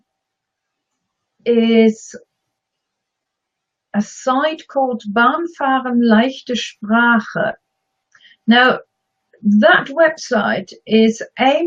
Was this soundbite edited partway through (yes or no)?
yes